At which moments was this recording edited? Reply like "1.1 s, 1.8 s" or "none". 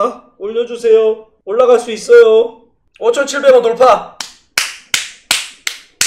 none